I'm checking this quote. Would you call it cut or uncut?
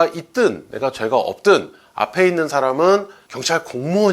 uncut